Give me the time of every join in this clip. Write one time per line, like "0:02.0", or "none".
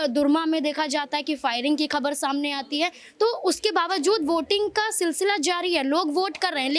none